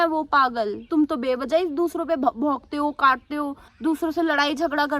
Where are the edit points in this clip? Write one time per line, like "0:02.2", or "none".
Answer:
0:00.9
0:03.6